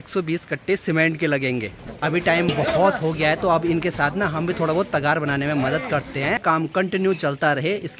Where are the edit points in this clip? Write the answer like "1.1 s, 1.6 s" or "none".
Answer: 1.8 s, 6.4 s